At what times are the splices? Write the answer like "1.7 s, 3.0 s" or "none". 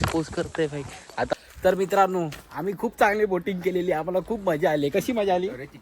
1.3 s